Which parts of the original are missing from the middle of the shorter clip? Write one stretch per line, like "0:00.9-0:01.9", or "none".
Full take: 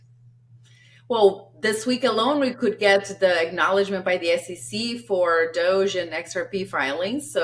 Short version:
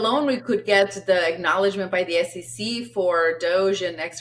none